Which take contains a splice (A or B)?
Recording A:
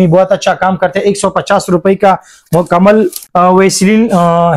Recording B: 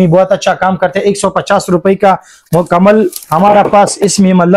A